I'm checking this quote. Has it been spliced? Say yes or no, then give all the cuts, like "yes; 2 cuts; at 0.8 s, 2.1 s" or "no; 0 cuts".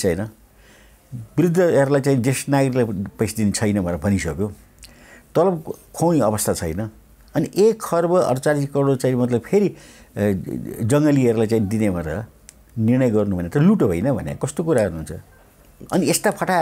no; 0 cuts